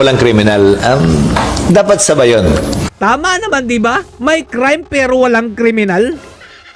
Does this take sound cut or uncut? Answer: uncut